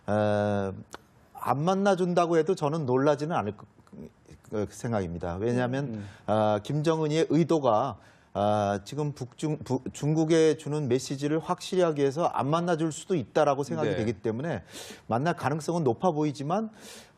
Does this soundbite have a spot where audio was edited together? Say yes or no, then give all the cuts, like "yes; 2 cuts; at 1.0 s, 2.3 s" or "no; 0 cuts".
no; 0 cuts